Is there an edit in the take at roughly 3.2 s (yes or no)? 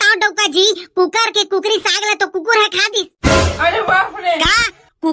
no